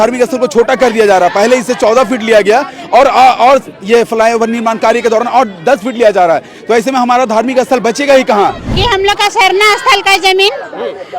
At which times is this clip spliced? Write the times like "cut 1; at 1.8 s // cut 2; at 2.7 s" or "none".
cut 1; at 8.7 s